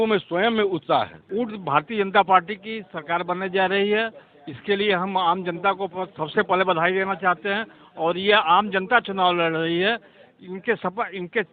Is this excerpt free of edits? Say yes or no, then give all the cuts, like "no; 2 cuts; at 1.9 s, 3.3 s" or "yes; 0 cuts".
no; 1 cut; at 1.2 s